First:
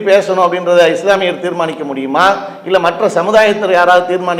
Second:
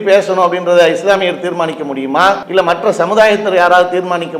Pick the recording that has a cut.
second; 1 cut; at 2.4 s

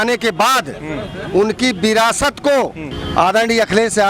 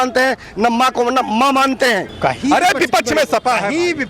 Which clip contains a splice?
second; 1 cut; at 2.1 s

